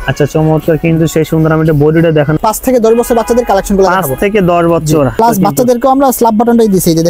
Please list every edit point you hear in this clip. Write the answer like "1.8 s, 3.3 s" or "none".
2.4 s, 5.2 s